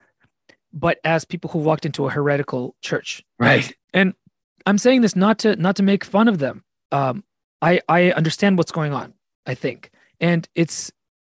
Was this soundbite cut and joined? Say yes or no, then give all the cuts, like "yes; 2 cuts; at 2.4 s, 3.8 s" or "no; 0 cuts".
yes; 1 cut; at 3.7 s